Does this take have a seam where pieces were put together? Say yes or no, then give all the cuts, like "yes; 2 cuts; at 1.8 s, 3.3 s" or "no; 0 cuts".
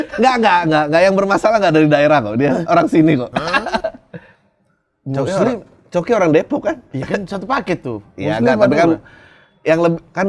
no; 0 cuts